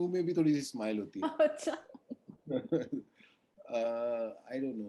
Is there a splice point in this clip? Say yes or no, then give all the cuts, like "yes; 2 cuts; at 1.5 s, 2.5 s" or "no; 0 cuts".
no; 0 cuts